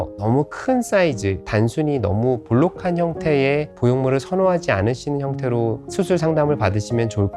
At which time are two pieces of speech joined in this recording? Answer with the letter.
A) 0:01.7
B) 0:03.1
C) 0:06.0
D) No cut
D